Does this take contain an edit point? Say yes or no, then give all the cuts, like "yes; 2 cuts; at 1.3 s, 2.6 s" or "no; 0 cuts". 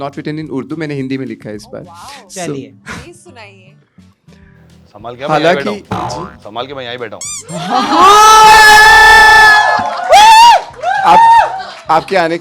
no; 0 cuts